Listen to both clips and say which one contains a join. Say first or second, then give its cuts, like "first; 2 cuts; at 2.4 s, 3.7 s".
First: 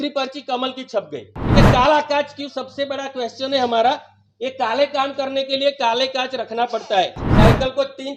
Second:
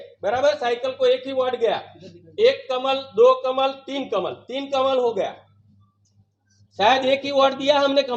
first; 2 cuts; at 1.5 s, 7.2 s